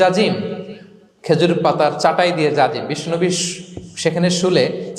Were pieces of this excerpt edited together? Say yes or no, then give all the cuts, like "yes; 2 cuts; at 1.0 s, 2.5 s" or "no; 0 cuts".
no; 0 cuts